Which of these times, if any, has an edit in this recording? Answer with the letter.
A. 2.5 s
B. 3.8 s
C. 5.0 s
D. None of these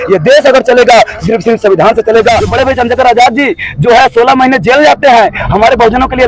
A